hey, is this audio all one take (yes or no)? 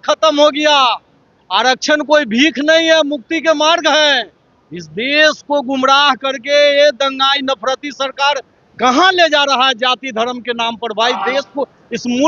yes